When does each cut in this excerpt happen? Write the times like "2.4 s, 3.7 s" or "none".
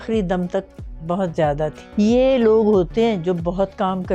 1.8 s